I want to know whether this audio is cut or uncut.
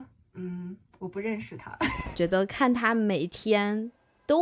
cut